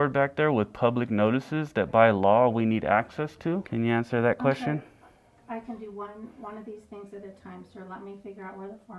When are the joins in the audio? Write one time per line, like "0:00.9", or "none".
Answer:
0:03.7